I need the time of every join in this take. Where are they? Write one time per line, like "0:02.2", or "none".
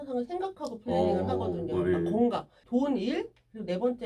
0:02.6